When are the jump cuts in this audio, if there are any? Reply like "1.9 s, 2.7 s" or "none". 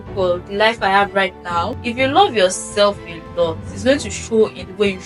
1.8 s